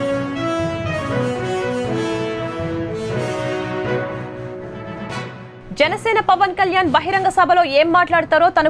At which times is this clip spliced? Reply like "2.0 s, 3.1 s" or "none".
none